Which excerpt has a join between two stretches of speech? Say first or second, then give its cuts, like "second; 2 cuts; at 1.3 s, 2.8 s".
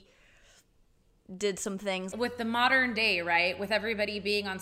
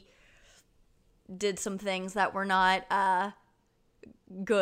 first; 1 cut; at 2.1 s